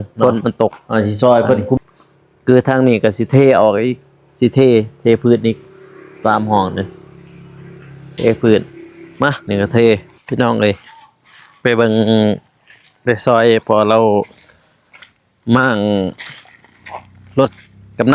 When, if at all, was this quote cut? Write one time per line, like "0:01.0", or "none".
0:00.8
0:01.8
0:10.1